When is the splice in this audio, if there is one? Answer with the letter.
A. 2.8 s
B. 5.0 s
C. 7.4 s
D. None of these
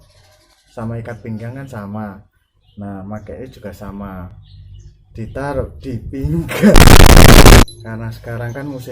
C